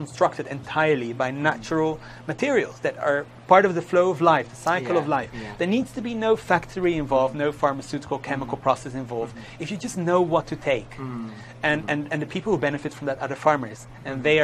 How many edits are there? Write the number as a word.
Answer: zero